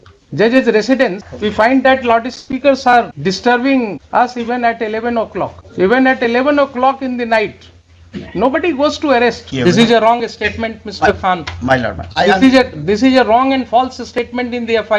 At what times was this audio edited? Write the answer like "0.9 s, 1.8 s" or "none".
1.3 s, 3.1 s, 4.0 s, 5.6 s, 9.5 s

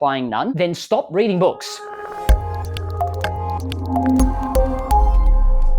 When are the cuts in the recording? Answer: 1.7 s

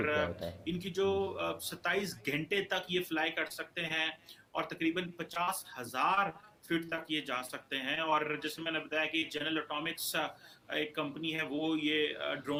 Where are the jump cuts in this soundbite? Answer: none

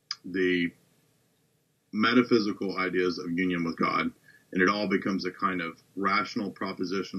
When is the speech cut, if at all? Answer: none

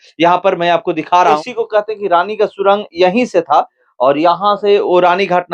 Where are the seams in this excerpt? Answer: 1.4 s

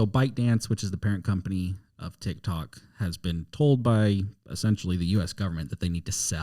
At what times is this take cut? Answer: none

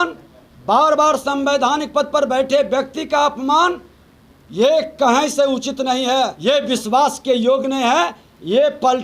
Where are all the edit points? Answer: 6.4 s

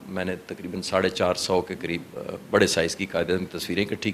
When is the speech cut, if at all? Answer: none

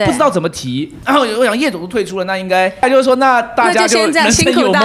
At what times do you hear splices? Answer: 0.9 s, 2.8 s

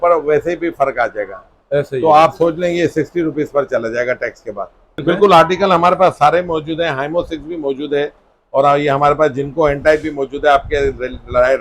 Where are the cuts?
5.0 s

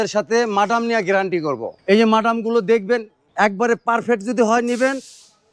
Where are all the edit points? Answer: 1.7 s, 3.2 s

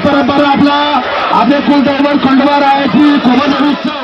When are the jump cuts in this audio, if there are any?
none

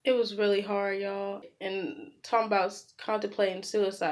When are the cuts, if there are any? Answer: 1.5 s

